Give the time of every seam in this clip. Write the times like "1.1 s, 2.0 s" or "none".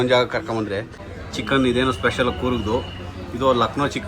none